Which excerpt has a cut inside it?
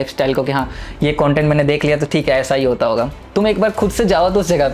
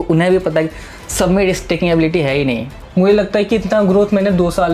second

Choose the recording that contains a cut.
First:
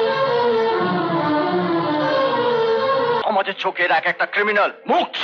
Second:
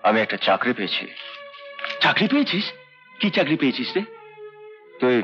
first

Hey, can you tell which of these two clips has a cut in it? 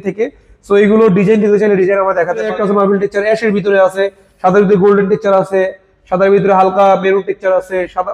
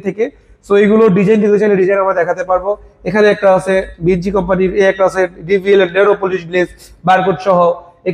first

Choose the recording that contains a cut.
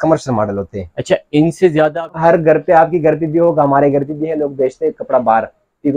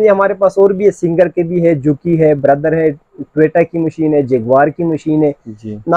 first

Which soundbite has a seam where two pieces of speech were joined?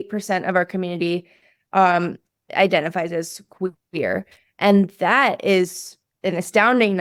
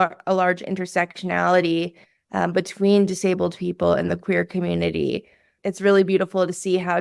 second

